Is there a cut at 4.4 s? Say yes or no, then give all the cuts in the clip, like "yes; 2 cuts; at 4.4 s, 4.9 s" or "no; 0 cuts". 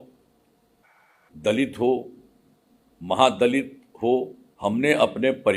yes; 1 cut; at 4.4 s